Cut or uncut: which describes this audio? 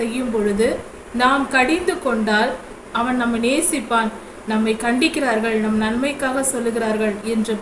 cut